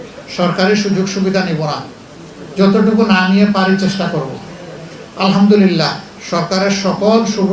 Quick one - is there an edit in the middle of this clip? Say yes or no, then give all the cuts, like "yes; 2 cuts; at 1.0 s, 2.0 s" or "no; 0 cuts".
no; 0 cuts